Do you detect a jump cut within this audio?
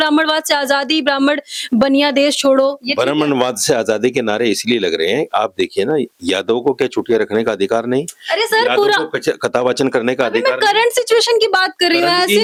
no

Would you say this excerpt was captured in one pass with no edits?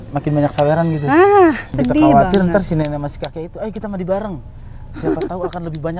no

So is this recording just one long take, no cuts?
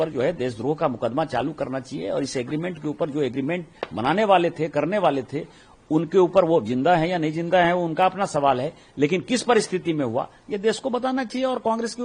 yes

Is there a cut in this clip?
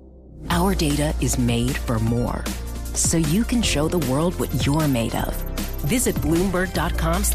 no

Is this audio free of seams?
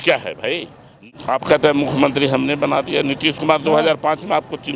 no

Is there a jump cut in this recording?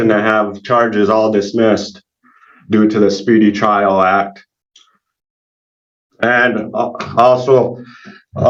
no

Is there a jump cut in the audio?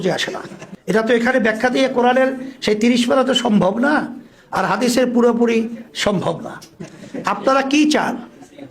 yes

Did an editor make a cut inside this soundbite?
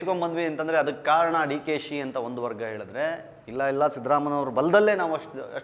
no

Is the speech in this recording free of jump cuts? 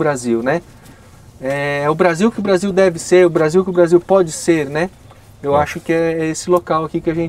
yes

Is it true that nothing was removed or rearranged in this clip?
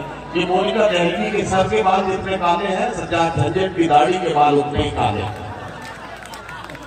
yes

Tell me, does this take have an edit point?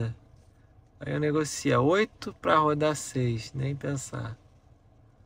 no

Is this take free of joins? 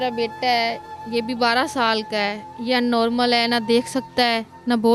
yes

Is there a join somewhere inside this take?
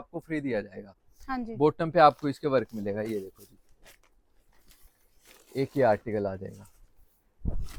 no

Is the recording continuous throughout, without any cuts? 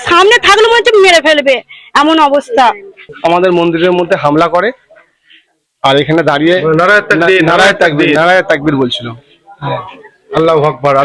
no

